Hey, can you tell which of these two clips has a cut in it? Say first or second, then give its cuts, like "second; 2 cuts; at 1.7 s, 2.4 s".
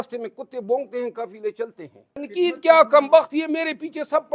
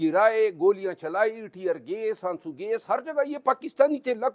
first; 1 cut; at 2.2 s